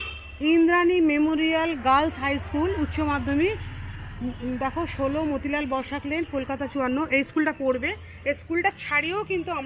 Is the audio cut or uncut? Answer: uncut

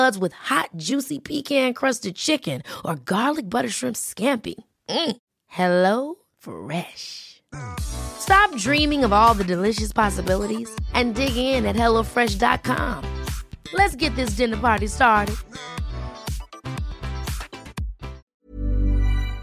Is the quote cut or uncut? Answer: cut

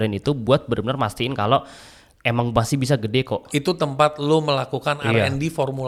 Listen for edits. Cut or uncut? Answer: uncut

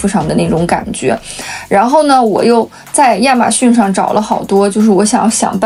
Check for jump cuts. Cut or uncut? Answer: uncut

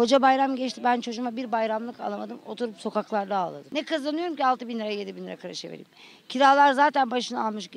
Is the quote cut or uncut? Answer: cut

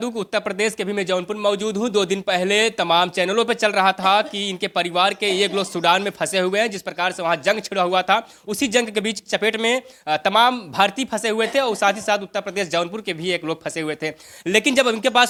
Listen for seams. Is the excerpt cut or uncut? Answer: uncut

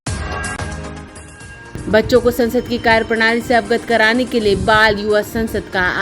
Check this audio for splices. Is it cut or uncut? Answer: cut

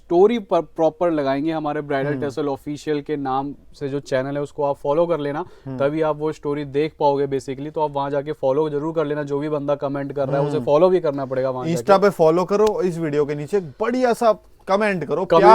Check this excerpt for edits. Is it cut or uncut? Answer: uncut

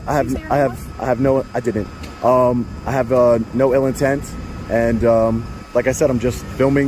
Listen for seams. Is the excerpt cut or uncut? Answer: uncut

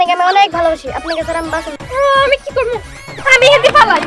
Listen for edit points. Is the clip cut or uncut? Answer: cut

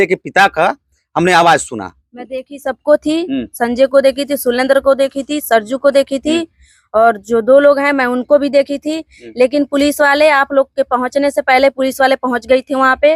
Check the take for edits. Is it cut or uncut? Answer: uncut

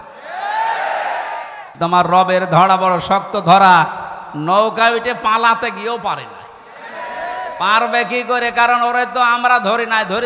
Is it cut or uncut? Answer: cut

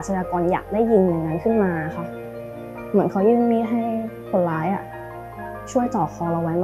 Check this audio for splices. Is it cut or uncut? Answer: uncut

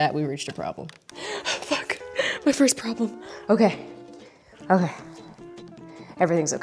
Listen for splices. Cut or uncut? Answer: uncut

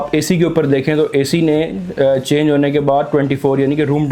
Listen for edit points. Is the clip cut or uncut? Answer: uncut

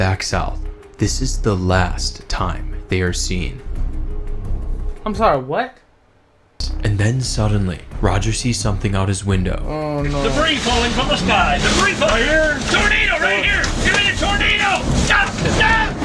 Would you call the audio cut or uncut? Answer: cut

